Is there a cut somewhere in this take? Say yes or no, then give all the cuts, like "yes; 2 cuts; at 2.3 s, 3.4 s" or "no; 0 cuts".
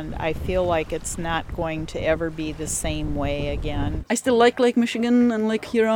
yes; 1 cut; at 4.0 s